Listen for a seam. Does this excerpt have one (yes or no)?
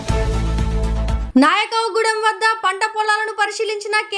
yes